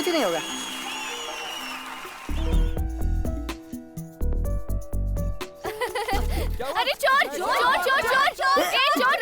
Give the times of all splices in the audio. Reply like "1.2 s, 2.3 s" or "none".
2.2 s